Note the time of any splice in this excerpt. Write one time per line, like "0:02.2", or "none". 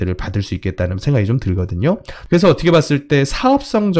0:02.1